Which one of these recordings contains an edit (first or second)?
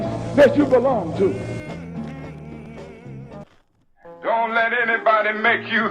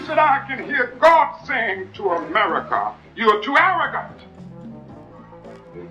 first